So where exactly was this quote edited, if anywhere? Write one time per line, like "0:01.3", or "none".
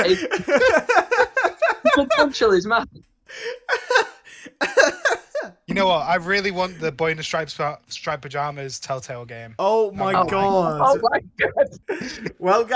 0:11.9